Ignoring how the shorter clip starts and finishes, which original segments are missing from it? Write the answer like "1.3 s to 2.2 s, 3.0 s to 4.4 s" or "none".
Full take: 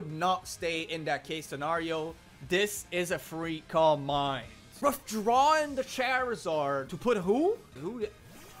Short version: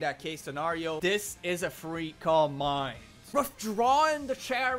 2.0 s to 2.5 s